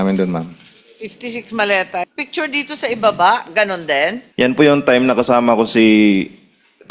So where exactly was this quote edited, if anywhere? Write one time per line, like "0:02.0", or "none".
0:02.1
0:04.2